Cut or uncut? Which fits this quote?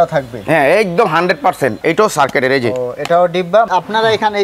cut